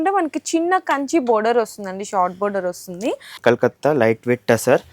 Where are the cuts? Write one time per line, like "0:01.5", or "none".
0:03.4